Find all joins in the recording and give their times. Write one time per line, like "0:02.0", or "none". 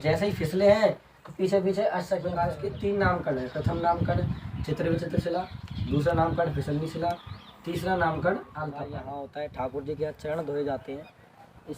0:02.5
0:08.9